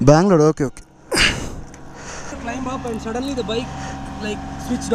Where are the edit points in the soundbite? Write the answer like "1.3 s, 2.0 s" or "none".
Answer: 2.3 s